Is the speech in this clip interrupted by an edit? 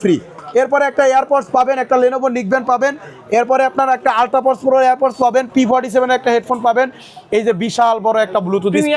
no; 0 cuts

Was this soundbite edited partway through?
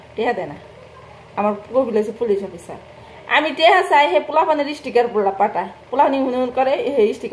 no; 0 cuts

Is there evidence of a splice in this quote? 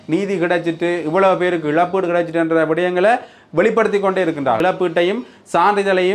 yes; 1 cut; at 4.6 s

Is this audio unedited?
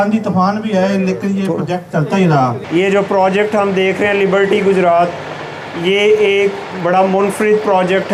yes; 0 cuts

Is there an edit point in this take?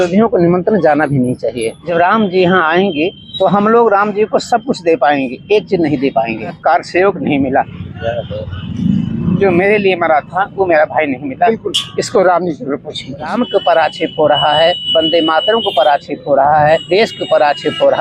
yes; 6 cuts; at 1.7 s, 3.2 s, 6.6 s, 13.3 s, 14.8 s, 16.8 s

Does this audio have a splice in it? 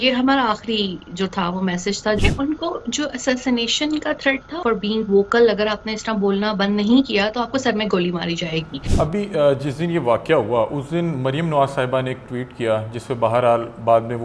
yes; 3 cuts; at 2.2 s, 4.5 s, 8.8 s

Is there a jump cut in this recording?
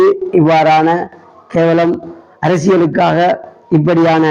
no; 0 cuts

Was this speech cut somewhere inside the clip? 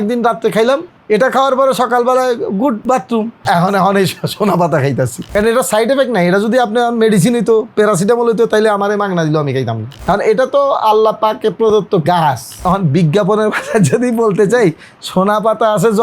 yes; 2 cuts; at 5.3 s, 12.6 s

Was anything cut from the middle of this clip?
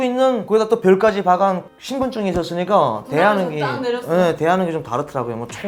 no; 0 cuts

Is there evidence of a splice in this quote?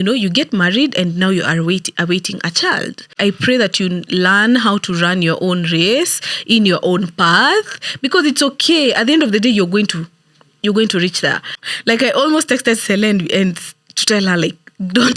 yes; 2 cuts; at 3.1 s, 11.6 s

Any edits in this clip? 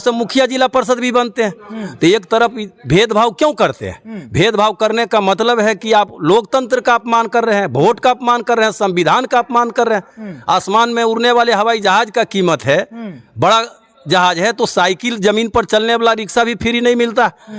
no; 0 cuts

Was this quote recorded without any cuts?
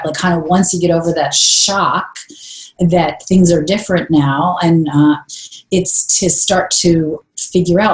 yes; 0 cuts

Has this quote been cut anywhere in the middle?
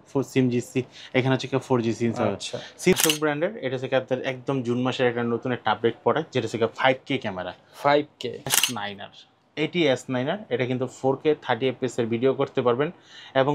yes; 2 cuts; at 2.9 s, 8.5 s

